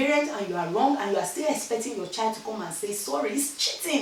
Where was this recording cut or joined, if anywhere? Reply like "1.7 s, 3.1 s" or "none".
none